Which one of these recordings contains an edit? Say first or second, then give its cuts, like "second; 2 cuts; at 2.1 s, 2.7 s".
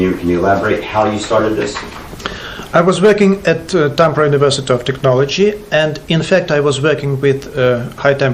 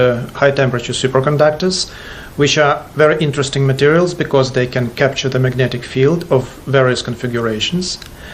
second; 1 cut; at 6.2 s